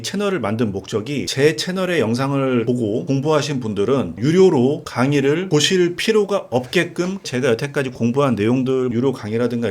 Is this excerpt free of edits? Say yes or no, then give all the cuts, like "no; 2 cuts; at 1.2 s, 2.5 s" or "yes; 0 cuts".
no; 5 cuts; at 1.3 s, 2.8 s, 4.9 s, 7.3 s, 8.9 s